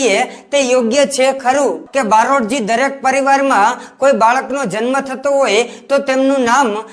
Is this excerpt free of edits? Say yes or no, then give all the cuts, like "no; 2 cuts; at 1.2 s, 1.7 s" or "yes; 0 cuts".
no; 1 cut; at 1.8 s